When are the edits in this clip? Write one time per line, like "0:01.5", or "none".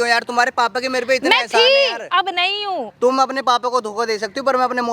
0:02.9